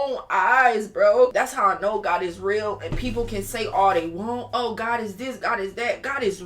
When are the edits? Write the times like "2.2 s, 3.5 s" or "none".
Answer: 1.3 s

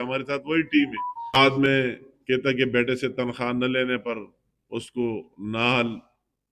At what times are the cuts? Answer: 1.4 s

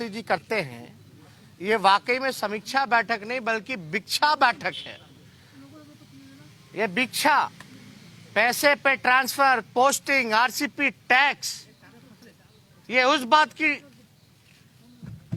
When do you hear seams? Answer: none

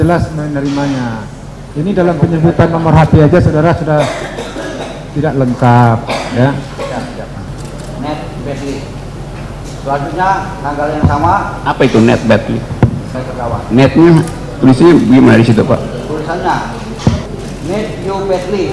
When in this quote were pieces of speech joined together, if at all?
7.4 s, 13.2 s, 17.3 s

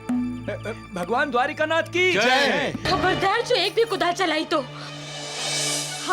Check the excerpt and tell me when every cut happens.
2.8 s

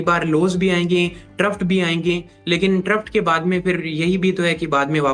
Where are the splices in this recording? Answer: none

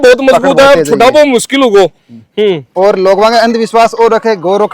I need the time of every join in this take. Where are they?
2.7 s

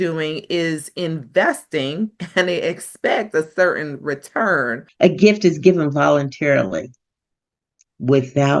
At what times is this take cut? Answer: 4.8 s

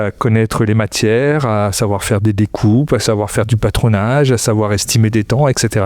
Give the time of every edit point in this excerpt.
none

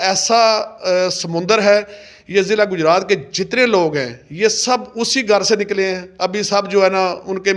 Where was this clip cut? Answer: none

